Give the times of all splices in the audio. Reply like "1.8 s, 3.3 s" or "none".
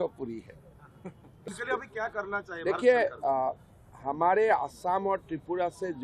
1.4 s